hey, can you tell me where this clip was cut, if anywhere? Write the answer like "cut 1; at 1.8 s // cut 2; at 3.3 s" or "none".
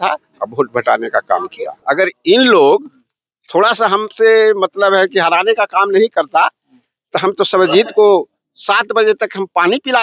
cut 1; at 1.7 s